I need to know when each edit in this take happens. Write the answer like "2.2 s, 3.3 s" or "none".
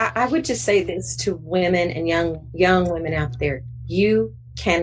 none